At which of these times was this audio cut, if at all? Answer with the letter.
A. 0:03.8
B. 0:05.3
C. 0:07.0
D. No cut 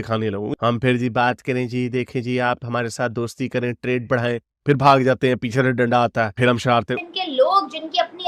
C